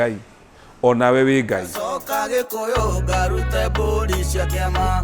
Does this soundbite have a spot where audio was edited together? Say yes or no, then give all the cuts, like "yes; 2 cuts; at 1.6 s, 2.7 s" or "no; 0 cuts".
yes; 1 cut; at 1.7 s